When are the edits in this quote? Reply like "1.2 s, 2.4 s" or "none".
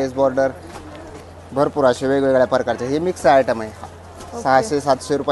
none